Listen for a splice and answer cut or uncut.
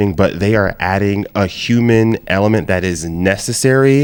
uncut